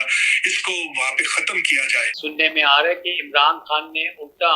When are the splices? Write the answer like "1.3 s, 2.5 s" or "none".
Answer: 2.1 s

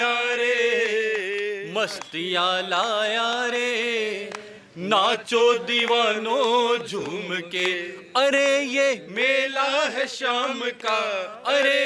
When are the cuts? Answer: none

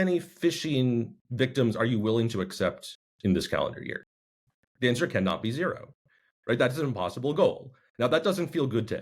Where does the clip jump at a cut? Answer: 1.2 s

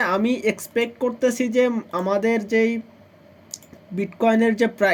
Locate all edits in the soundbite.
none

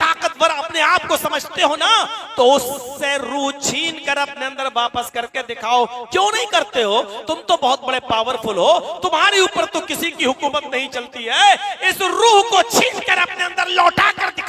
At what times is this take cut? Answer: none

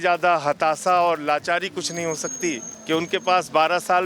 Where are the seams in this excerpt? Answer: 2.7 s

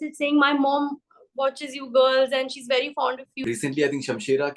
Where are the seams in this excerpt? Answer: 3.3 s

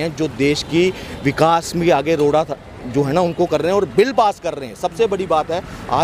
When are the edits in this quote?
none

